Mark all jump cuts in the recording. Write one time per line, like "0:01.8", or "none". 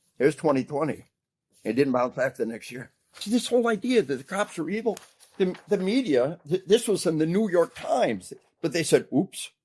0:03.2

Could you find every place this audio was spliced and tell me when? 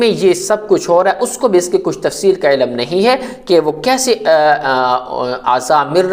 none

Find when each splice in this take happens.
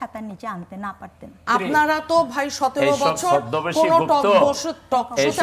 0:01.4

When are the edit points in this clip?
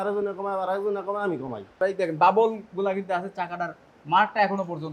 0:01.7

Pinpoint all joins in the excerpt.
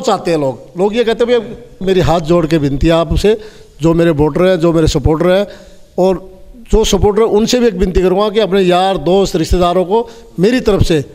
0:01.8

